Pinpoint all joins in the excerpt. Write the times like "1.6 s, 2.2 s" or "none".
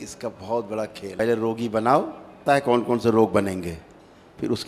1.2 s, 2.4 s